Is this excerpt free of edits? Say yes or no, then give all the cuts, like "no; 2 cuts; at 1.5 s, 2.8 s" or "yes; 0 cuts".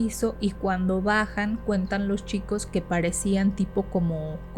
yes; 0 cuts